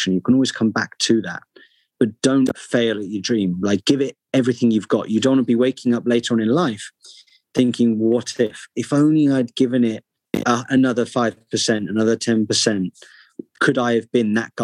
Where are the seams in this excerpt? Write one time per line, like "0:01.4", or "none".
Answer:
none